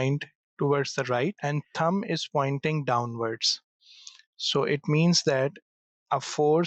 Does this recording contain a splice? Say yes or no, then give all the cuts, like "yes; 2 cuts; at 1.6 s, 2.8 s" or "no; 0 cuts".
yes; 1 cut; at 1.4 s